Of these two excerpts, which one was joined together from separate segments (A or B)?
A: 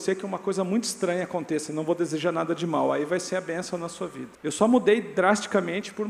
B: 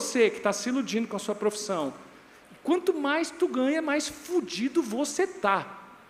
A